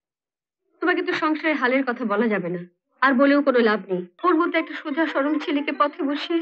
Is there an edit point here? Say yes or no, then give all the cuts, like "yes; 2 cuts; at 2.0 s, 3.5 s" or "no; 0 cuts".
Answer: yes; 1 cut; at 4.1 s